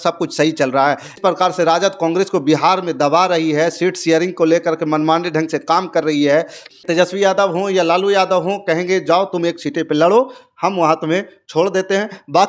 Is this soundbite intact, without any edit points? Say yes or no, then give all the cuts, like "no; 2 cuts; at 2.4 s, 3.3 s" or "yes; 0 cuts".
no; 2 cuts; at 1.2 s, 6.6 s